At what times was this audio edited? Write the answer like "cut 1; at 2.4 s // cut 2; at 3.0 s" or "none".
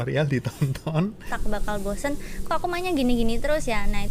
cut 1; at 1.3 s